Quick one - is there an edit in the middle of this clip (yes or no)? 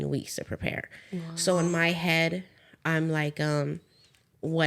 no